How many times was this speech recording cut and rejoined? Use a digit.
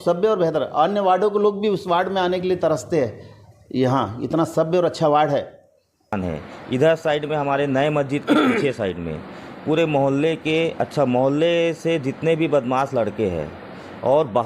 1